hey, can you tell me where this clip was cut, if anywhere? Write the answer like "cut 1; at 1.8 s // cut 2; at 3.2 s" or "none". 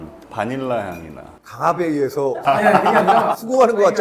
none

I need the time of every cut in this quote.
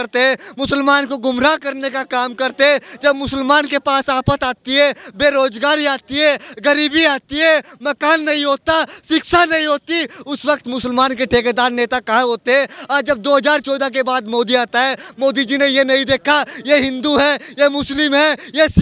none

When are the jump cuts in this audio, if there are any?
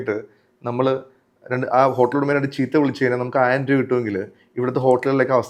none

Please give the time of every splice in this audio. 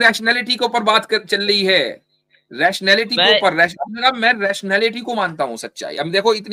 none

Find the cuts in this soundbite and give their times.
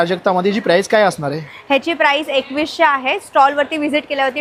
none

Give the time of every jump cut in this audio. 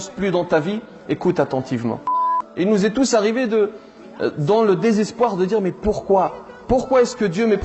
cut 1; at 2.4 s

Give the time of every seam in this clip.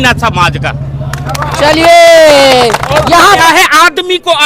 cut 1; at 3.4 s

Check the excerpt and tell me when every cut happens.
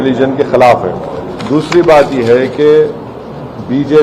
cut 1; at 1.3 s

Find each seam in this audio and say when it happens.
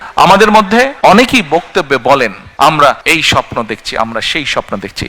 cut 1; at 0.9 s // cut 2; at 2.4 s // cut 3; at 3.0 s

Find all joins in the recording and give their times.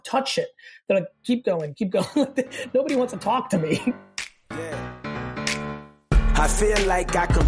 cut 1; at 4.0 s

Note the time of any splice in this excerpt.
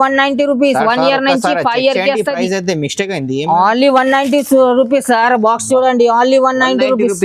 none

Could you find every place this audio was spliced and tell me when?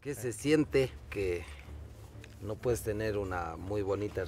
cut 1; at 1.1 s

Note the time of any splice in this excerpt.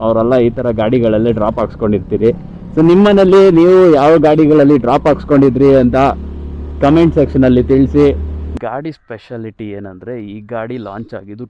cut 1; at 8.5 s

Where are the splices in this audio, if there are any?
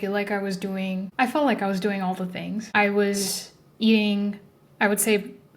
cut 1; at 1.1 s // cut 2; at 2.7 s

